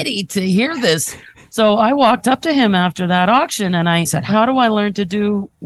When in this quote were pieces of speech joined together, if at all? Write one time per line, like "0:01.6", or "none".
0:01.3
0:02.2
0:04.3